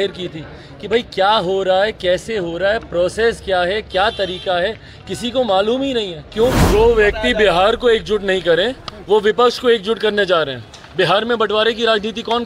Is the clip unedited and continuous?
no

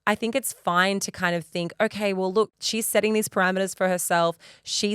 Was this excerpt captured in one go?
no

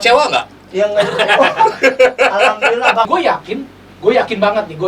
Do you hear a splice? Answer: yes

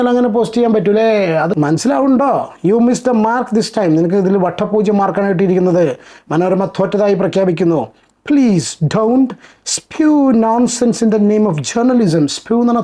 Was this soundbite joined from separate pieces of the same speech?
yes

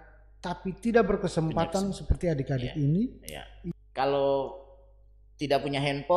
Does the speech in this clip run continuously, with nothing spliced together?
no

